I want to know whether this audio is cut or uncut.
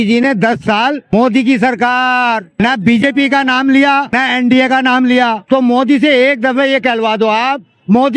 cut